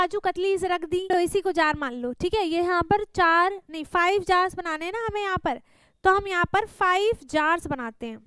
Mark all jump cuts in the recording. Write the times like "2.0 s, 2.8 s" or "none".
1.1 s